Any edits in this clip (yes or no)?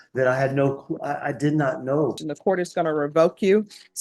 yes